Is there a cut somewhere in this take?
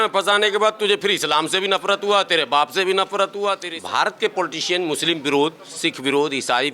yes; 1 cut; at 3.7 s

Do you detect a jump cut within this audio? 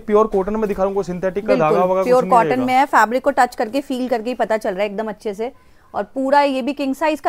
no; 0 cuts

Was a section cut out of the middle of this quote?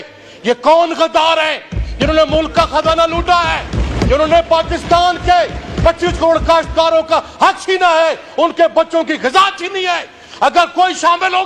no; 0 cuts

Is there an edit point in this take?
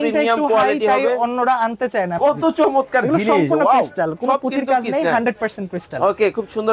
yes; 1 cut; at 2.1 s

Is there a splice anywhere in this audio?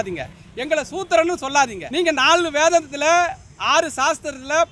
yes; 1 cut; at 1.8 s

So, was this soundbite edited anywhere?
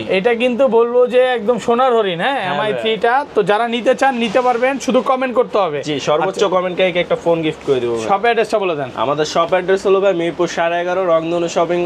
no; 0 cuts

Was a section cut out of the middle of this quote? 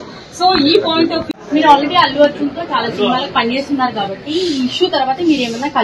yes; 1 cut; at 1.3 s

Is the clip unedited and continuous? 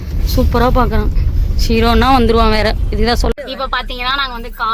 no; 1 cut; at 3.3 s

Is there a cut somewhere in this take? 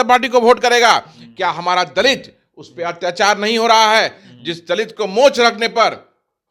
no; 0 cuts

